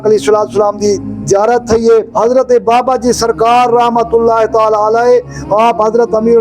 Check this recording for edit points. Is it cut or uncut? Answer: cut